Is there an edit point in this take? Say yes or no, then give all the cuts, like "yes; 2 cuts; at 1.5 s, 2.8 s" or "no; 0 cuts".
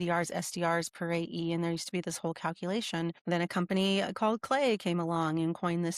yes; 1 cut; at 3.2 s